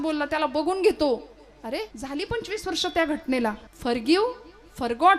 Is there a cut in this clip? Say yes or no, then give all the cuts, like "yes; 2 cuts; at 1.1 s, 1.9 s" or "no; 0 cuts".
yes; 2 cuts; at 1.9 s, 3.7 s